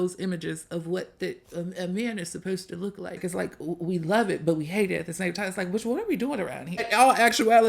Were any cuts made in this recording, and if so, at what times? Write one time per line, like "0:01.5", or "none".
0:03.2
0:06.8